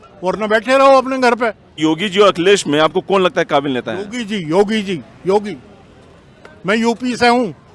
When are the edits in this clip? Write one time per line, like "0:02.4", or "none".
0:01.8